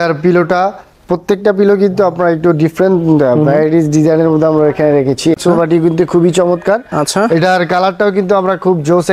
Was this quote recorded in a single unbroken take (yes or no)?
no